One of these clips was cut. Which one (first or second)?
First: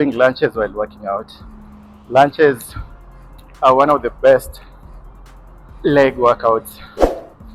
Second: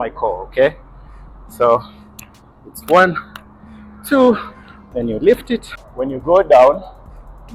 second